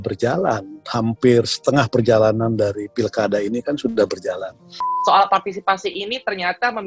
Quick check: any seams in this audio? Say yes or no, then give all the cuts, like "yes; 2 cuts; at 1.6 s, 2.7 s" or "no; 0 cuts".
yes; 1 cut; at 4.8 s